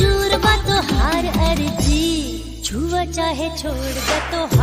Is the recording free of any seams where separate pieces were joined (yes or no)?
yes